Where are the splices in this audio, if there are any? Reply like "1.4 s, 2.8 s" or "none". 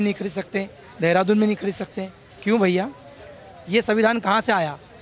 none